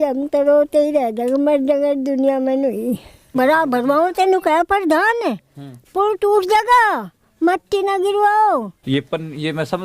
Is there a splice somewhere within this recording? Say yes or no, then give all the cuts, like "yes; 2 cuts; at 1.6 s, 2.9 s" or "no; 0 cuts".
yes; 2 cuts; at 3.3 s, 8.7 s